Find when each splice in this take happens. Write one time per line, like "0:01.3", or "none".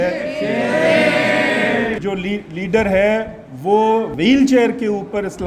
0:02.0
0:04.1